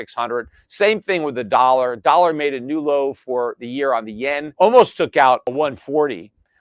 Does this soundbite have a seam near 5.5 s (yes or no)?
yes